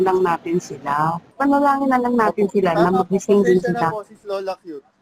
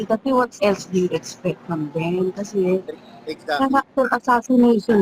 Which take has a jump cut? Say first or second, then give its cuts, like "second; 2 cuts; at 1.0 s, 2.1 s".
first; 1 cut; at 1.3 s